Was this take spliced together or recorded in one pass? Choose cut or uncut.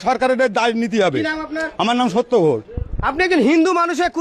uncut